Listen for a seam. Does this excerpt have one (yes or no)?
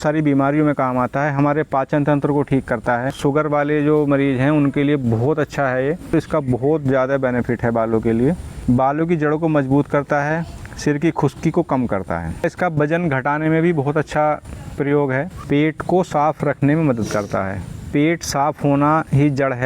yes